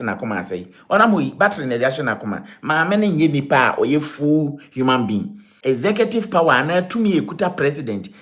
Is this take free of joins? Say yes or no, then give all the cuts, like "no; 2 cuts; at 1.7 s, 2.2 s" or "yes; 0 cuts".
no; 1 cut; at 5.5 s